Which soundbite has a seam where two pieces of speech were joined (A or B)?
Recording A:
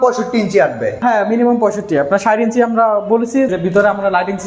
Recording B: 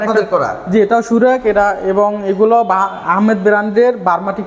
A